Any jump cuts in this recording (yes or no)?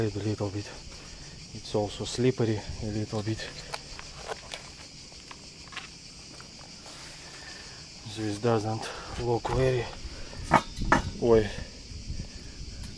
no